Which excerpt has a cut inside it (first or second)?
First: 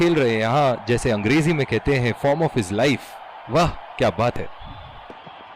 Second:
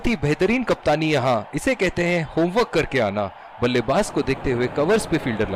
first